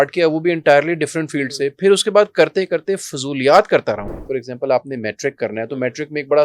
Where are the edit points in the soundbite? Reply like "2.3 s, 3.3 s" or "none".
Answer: 4.1 s